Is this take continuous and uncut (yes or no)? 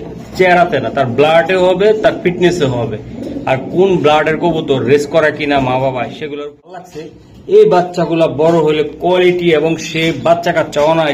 no